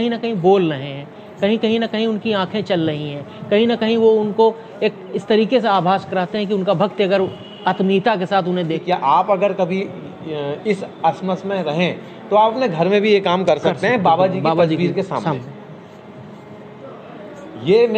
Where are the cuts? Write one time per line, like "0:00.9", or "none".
0:08.8

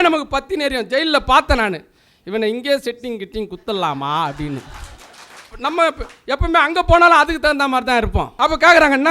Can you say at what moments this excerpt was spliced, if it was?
0:05.5
0:08.3

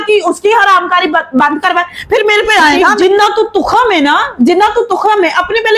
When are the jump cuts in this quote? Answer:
0:03.0

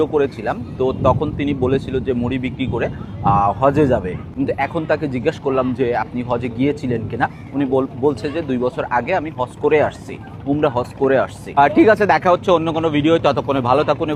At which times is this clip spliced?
none

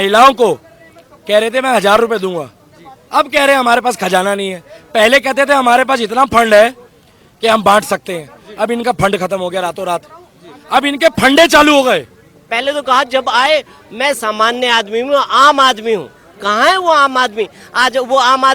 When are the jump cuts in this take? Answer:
0:12.4

